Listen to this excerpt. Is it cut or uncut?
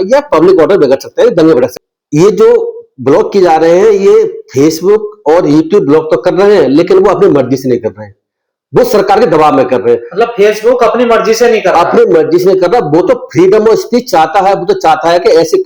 cut